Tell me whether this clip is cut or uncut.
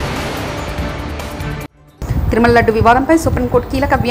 cut